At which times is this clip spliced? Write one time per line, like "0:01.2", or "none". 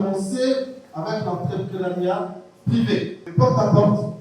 0:03.3